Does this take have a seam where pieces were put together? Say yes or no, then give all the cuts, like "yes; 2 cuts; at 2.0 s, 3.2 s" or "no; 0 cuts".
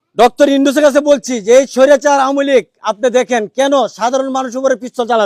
no; 0 cuts